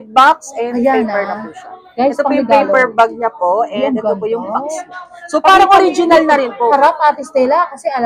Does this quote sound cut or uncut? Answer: uncut